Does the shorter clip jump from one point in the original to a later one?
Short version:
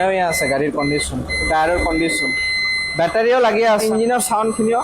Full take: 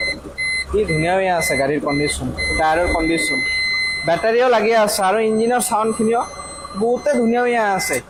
yes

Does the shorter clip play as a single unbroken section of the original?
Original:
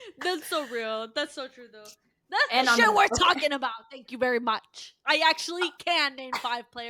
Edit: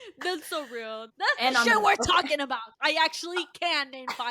no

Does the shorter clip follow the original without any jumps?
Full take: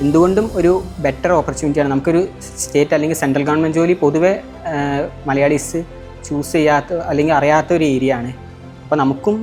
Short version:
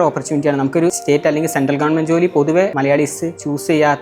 no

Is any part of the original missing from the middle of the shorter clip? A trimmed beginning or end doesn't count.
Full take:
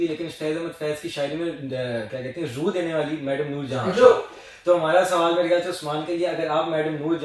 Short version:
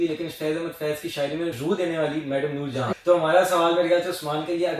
yes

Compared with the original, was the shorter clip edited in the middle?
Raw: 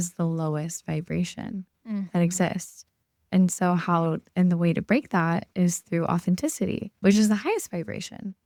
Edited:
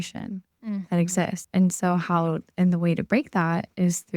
yes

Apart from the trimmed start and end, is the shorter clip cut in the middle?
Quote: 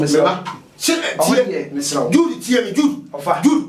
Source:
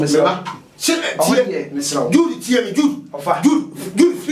no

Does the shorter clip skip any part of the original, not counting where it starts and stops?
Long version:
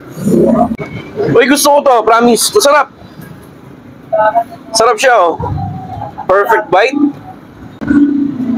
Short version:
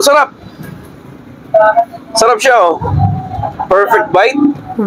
no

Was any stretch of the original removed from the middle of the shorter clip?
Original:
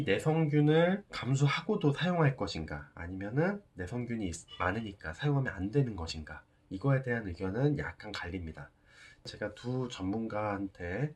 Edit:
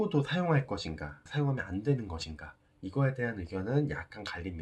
yes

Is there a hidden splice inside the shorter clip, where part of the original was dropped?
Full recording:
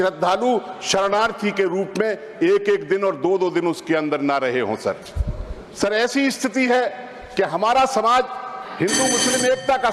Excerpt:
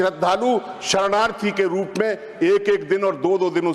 no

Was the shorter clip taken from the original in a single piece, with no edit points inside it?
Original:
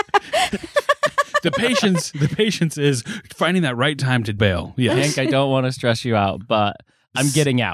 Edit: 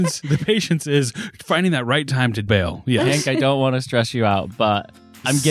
yes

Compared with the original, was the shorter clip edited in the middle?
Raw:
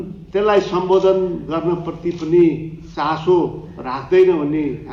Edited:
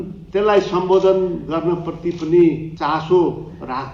yes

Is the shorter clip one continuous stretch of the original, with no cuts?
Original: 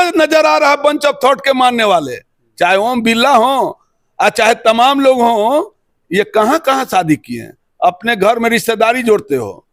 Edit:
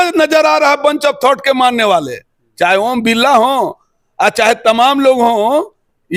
yes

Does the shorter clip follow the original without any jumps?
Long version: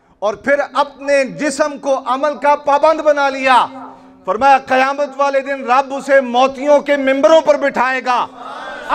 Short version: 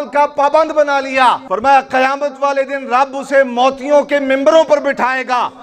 no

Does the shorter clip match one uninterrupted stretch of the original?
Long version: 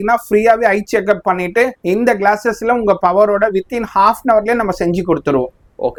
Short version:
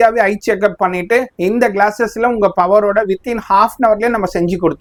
yes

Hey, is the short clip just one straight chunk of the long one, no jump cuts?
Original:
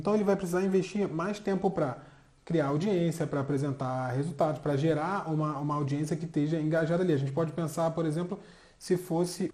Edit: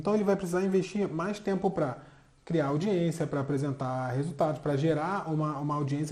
yes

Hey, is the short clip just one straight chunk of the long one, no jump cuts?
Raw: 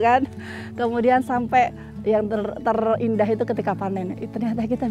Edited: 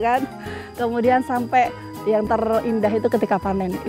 no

